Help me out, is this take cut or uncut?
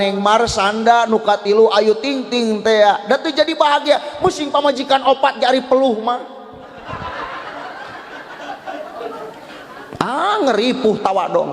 uncut